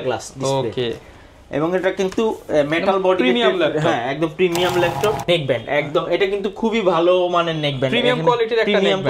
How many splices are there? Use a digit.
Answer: 1